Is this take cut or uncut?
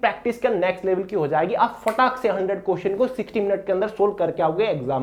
uncut